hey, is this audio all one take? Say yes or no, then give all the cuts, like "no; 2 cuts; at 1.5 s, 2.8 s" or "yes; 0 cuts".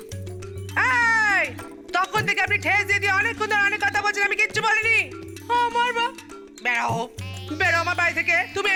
yes; 0 cuts